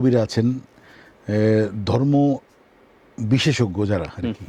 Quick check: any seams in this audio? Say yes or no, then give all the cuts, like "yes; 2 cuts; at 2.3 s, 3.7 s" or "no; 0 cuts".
no; 0 cuts